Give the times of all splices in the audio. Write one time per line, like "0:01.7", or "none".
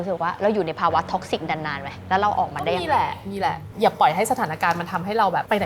0:03.6